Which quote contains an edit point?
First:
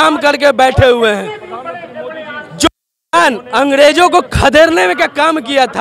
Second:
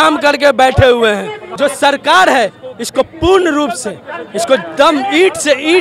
second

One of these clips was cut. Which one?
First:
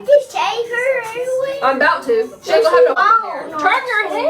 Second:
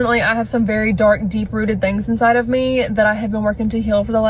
first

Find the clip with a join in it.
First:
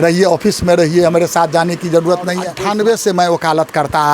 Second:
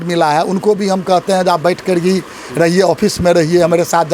first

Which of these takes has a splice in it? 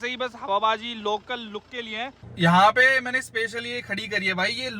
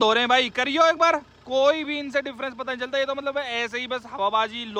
first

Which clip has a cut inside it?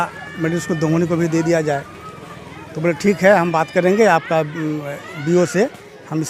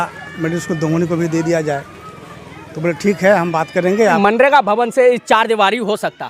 second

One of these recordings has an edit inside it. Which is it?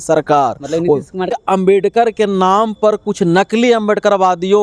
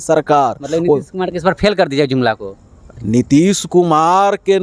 first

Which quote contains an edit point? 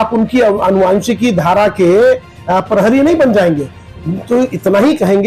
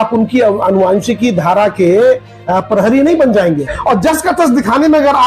second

